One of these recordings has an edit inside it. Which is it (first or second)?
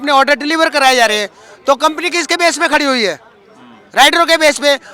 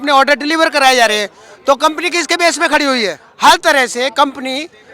second